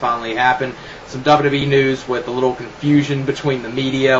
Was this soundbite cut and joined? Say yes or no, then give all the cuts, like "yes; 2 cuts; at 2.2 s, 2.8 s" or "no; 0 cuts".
no; 0 cuts